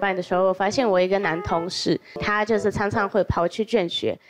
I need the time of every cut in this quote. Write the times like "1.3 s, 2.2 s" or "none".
2.1 s